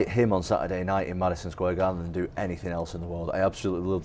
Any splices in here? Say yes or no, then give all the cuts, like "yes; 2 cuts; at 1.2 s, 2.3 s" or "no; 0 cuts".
no; 0 cuts